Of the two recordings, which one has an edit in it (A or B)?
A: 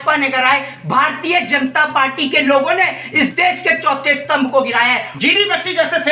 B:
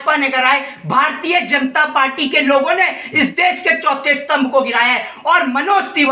A